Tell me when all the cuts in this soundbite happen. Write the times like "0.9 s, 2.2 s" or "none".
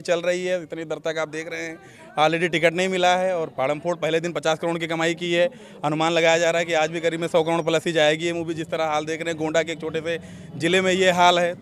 none